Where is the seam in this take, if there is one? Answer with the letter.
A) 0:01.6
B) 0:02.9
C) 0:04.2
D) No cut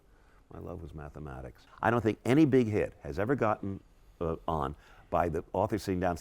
A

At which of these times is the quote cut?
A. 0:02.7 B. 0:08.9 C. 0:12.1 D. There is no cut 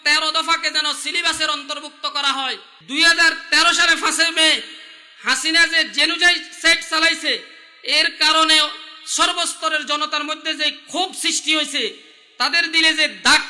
A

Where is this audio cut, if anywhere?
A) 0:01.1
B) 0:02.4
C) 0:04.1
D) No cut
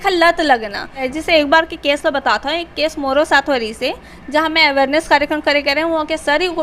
A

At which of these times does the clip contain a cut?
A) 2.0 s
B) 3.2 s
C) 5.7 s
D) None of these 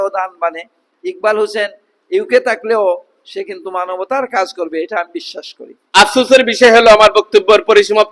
C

